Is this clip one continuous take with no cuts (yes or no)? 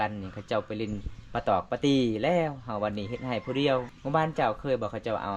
no